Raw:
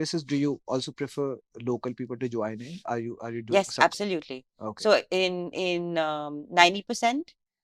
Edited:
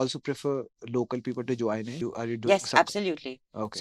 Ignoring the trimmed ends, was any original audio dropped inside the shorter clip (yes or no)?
yes